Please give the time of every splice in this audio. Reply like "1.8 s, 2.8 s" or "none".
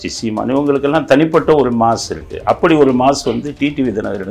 none